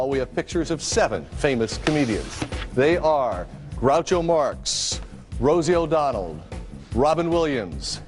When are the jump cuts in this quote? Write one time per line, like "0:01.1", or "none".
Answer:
none